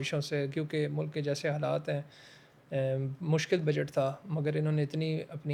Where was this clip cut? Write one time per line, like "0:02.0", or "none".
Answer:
none